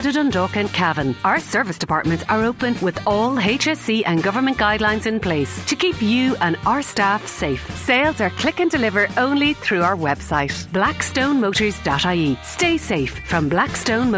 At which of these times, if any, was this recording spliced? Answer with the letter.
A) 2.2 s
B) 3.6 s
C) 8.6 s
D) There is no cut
D